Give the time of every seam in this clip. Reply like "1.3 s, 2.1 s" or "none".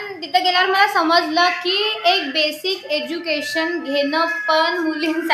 none